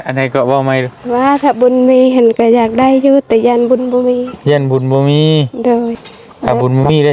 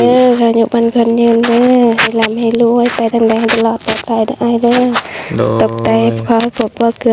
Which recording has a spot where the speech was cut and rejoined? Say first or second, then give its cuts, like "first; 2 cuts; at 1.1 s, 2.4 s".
first; 1 cut; at 6.0 s